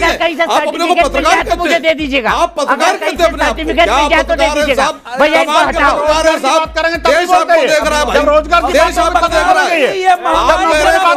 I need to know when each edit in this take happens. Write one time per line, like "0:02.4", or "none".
none